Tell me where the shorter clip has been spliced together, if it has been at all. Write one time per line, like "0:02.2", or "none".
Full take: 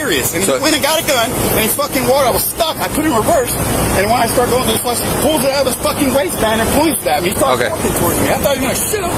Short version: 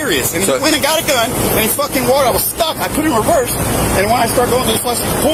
none